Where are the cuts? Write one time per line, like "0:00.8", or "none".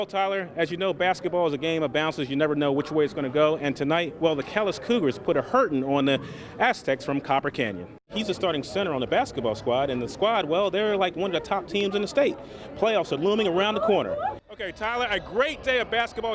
0:08.1
0:14.4